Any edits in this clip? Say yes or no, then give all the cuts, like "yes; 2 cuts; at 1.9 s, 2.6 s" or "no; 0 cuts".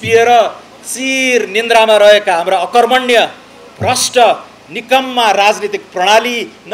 no; 0 cuts